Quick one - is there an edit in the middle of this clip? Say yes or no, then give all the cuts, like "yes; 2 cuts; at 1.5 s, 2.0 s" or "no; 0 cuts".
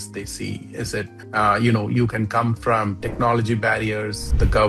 no; 0 cuts